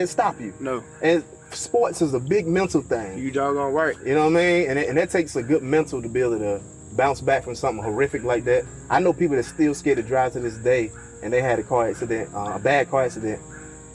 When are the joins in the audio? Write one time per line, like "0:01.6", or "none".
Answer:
none